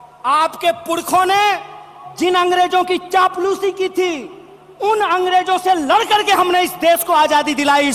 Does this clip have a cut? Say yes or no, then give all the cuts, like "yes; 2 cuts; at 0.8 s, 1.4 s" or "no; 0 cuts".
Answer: no; 0 cuts